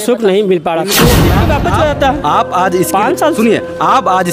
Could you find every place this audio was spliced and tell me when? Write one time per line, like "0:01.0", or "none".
0:01.4